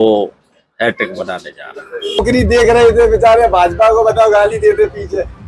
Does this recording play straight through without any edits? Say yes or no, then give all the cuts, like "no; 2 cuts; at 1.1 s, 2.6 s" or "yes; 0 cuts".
no; 1 cut; at 2.2 s